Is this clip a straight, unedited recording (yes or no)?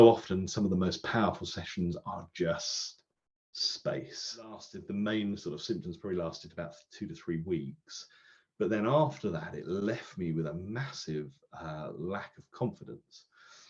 no